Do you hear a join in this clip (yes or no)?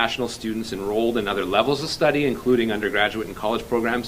no